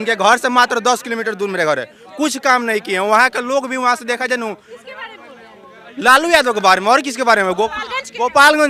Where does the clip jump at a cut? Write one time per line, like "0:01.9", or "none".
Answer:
none